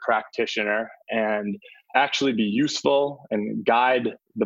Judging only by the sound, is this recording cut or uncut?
cut